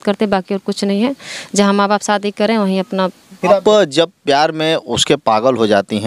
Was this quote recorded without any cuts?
no; 1 cut; at 3.6 s

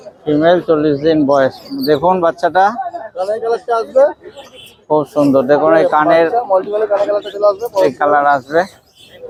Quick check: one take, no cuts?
yes; 0 cuts

